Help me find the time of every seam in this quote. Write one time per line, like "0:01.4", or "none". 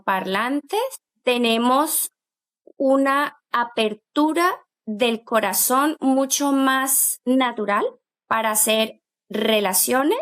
0:08.1